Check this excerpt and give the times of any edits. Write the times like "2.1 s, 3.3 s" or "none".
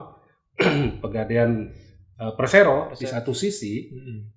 2.9 s